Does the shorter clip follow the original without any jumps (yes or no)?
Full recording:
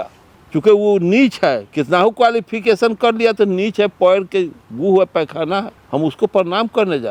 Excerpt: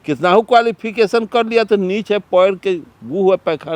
yes